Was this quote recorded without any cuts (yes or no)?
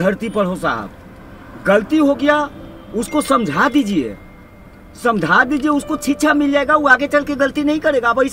yes